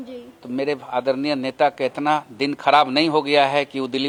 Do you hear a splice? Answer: no; 0 cuts

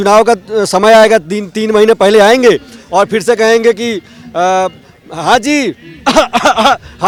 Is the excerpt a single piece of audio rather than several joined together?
yes; 0 cuts

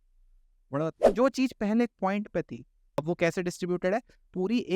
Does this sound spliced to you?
yes; 2 cuts; at 1.0 s, 3.0 s

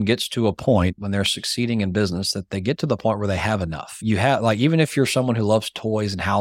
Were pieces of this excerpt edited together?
no; 0 cuts

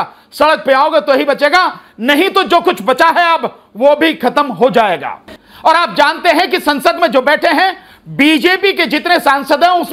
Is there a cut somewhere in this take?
no; 0 cuts

